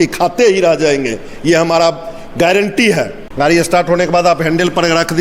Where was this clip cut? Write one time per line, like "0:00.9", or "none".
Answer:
0:03.2